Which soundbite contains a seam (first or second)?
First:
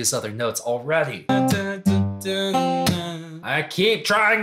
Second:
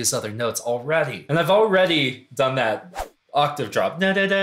first